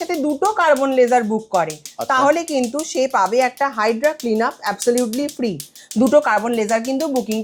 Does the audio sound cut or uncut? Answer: uncut